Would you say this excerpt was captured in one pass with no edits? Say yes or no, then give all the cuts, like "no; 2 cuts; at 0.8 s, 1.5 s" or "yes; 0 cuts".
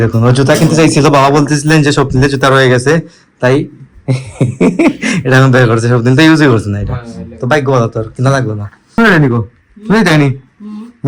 yes; 0 cuts